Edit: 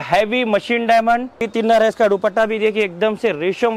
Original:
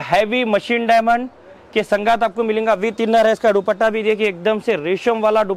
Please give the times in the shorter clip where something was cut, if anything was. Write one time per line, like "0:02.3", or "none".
0:01.4